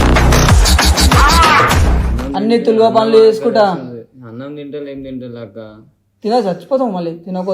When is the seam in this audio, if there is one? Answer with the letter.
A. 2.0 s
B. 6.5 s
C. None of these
C